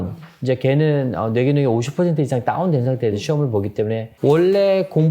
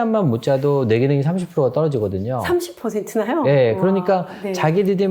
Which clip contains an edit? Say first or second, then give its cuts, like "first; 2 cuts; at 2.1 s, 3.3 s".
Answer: first; 1 cut; at 4.1 s